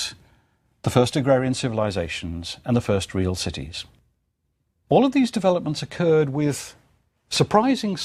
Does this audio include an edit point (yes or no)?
yes